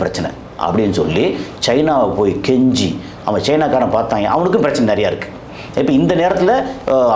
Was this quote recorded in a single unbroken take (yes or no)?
yes